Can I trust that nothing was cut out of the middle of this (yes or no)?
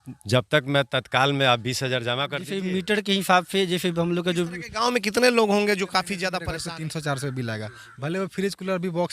no